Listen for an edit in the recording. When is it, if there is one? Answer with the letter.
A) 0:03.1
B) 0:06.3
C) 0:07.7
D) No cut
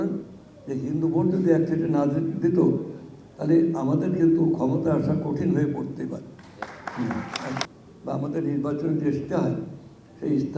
C